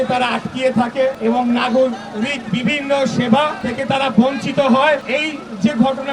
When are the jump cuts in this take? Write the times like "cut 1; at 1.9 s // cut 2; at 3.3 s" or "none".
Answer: cut 1; at 1.2 s // cut 2; at 3.6 s // cut 3; at 5.0 s